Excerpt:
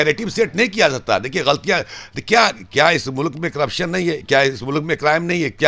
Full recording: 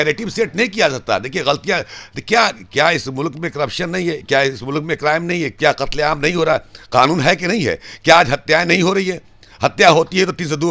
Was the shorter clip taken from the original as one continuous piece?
yes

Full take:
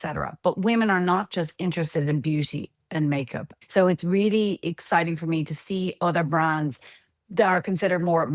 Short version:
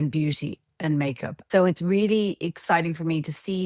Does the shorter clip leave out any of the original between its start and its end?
yes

